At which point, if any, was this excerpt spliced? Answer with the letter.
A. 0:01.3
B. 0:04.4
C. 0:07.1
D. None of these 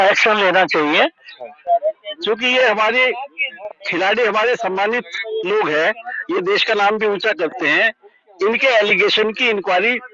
A